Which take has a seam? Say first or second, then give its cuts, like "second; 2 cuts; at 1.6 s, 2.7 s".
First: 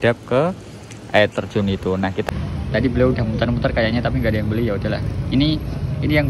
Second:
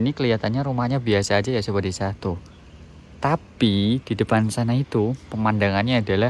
first; 1 cut; at 2.2 s